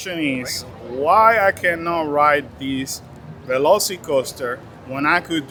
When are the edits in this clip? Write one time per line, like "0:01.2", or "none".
none